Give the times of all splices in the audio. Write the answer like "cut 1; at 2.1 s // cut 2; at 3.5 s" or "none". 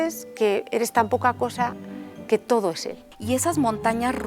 cut 1; at 3.1 s

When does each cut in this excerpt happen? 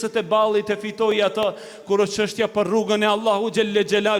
none

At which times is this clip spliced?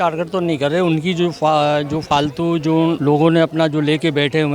cut 1; at 3.0 s

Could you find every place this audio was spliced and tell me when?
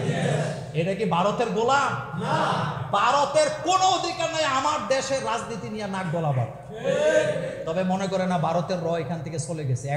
none

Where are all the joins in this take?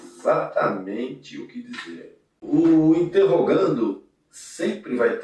cut 1; at 2.3 s

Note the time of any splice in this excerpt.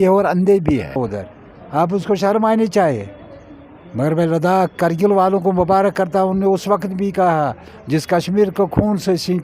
cut 1; at 1.0 s

